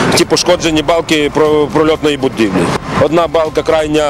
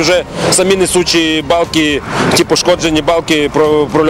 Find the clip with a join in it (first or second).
first